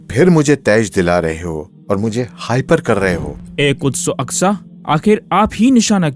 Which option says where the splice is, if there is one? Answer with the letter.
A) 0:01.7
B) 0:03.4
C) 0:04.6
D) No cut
B